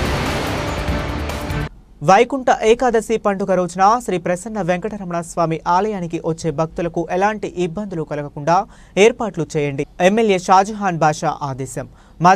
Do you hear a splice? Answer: yes; 1 cut; at 1.5 s

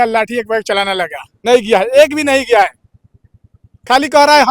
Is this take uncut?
no; 1 cut; at 1.3 s

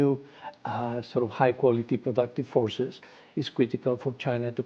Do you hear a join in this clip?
no; 0 cuts

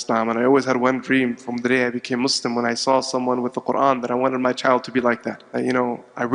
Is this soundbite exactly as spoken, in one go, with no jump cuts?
no; 1 cut; at 5.4 s

